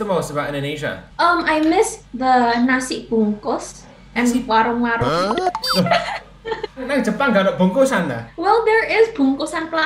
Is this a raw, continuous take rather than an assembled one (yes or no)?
yes